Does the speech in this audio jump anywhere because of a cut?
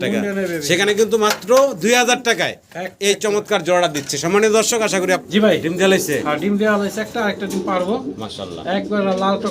yes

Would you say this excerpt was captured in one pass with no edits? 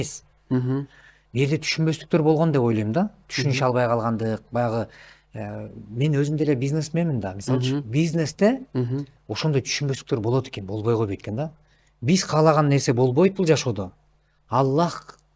yes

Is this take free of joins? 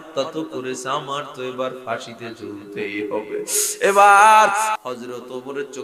no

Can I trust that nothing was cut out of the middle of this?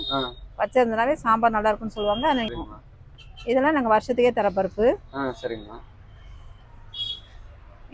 yes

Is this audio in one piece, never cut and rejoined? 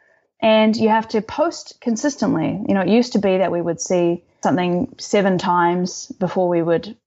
no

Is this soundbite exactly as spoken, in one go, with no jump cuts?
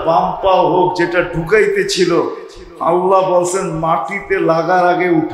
yes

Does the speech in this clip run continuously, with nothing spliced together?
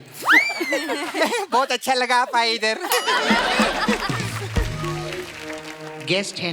yes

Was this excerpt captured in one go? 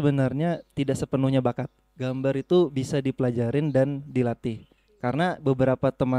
yes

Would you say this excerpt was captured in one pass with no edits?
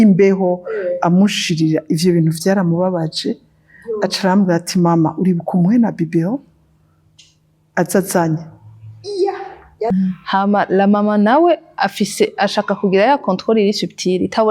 no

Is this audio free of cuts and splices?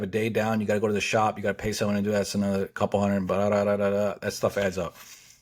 yes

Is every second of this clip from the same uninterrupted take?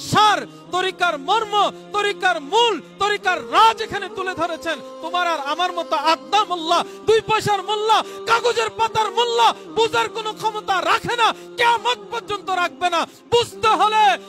yes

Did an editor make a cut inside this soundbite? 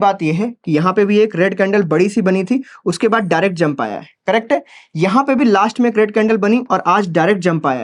no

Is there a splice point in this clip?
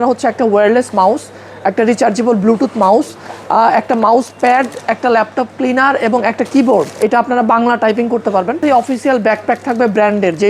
yes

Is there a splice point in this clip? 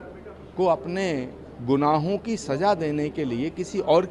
no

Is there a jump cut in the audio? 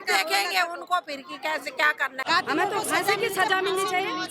yes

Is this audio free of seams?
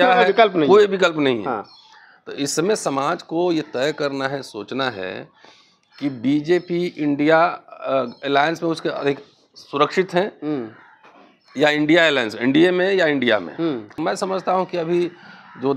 no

